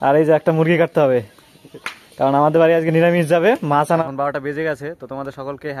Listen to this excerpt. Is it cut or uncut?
cut